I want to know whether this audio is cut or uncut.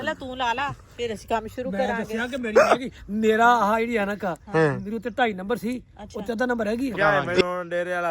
cut